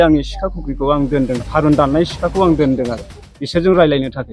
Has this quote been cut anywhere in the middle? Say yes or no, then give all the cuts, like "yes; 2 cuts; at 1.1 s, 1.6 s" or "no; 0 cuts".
no; 0 cuts